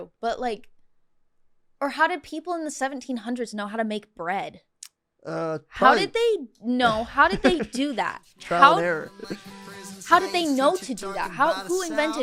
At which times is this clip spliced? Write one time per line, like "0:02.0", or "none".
none